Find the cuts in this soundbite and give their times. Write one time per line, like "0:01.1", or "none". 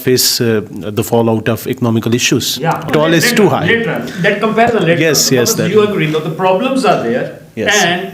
0:02.9